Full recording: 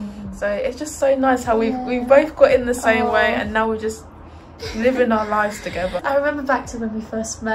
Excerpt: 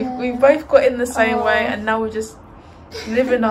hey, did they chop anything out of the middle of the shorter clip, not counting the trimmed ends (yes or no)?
no